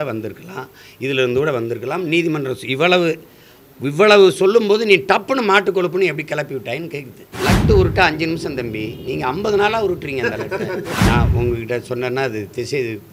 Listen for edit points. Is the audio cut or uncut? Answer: cut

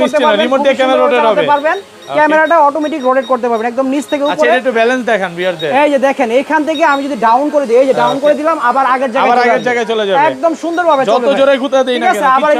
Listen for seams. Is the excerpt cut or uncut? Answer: uncut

